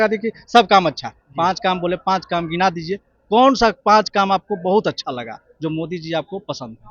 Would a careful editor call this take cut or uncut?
uncut